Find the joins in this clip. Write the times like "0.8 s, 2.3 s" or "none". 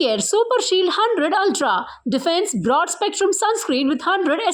none